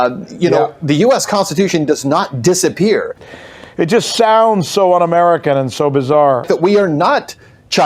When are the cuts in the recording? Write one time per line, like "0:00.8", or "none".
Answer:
0:03.2
0:06.4